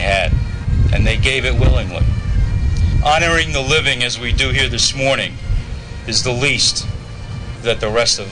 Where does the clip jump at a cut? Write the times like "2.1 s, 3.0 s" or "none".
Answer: 2.9 s